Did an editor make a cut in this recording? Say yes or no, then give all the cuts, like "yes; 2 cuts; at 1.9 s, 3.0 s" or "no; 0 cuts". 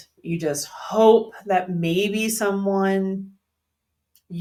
no; 0 cuts